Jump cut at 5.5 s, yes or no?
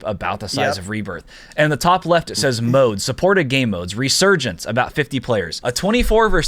yes